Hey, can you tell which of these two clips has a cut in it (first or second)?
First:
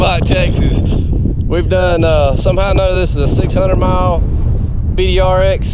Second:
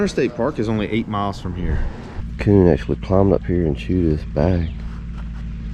second